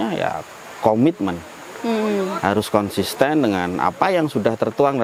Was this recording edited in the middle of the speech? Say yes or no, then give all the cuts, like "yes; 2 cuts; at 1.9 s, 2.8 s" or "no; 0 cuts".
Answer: no; 0 cuts